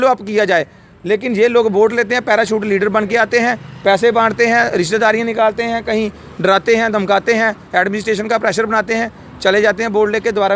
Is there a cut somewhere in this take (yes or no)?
no